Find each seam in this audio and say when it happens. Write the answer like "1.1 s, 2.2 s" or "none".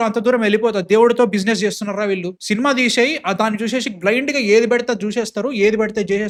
none